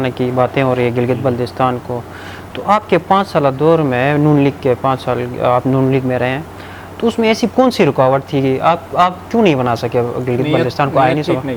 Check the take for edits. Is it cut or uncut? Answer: uncut